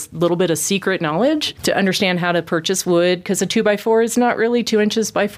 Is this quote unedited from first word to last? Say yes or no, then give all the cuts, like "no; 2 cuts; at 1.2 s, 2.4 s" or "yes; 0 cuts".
no; 1 cut; at 1.5 s